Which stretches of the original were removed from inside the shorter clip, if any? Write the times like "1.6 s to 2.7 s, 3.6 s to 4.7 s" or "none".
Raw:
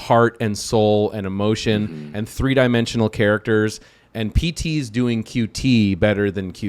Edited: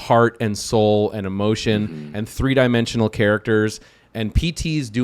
none